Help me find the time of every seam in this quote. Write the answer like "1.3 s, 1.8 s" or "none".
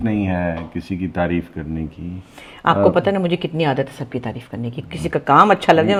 none